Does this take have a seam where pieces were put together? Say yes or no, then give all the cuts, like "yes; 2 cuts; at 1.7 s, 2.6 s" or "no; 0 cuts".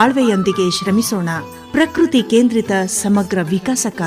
no; 0 cuts